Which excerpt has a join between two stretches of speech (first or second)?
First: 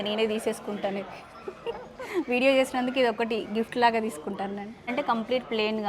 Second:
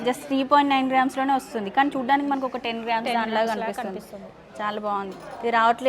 first